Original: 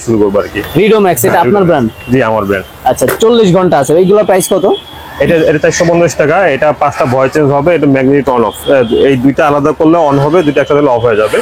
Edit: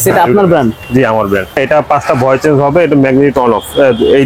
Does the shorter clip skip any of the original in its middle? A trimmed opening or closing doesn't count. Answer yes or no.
yes